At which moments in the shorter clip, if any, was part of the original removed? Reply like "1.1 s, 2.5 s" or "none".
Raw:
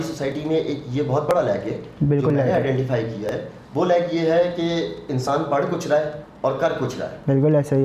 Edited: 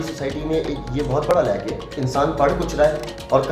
1.9 s